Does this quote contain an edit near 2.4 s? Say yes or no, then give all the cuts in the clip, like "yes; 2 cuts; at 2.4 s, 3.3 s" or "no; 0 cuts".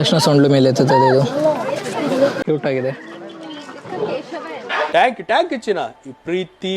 yes; 1 cut; at 2.4 s